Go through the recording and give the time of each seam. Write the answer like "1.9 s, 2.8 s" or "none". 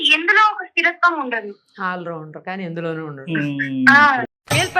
none